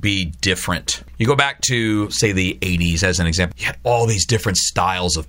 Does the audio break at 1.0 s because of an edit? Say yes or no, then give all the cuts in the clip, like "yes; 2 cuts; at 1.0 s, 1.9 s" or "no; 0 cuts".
yes; 2 cuts; at 1.0 s, 3.5 s